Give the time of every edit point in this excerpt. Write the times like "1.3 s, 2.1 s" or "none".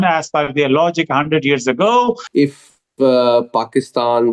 2.3 s